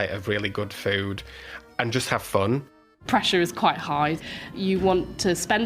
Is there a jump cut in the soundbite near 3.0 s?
yes; 2 cuts; at 3.0 s, 4.5 s

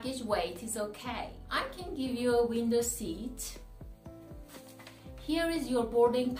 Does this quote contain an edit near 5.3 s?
yes; 2 cuts; at 3.5 s, 5.3 s

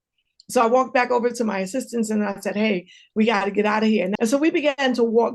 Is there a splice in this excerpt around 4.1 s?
yes; 1 cut; at 4.1 s

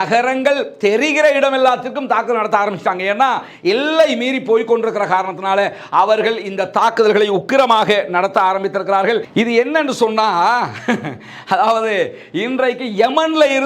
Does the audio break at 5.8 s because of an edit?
no; 1 cut; at 9.3 s

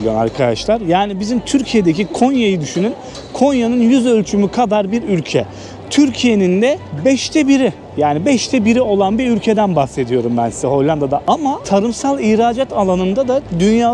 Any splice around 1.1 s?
no; 0 cuts

